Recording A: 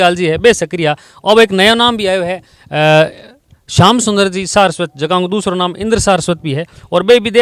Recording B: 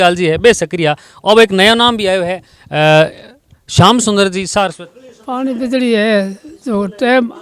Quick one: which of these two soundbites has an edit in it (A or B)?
B